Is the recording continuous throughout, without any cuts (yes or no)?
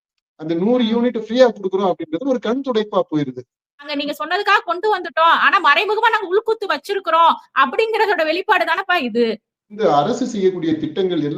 no